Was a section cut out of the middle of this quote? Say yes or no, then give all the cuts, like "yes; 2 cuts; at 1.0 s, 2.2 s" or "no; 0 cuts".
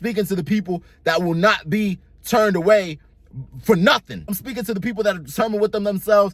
yes; 1 cut; at 4.3 s